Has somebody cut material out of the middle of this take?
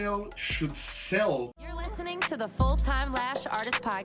yes; 1 cut; at 1.7 s

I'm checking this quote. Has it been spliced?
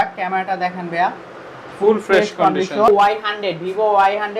yes; 1 cut; at 2.9 s

